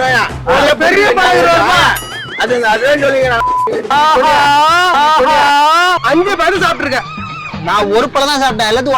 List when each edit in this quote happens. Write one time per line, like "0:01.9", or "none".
0:03.9
0:06.0